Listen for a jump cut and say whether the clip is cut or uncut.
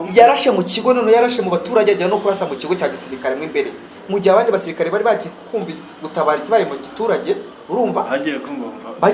uncut